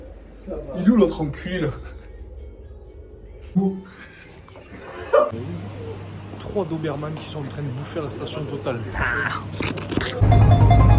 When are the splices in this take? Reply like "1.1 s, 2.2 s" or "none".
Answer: none